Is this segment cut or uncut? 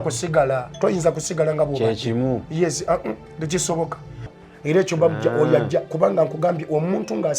cut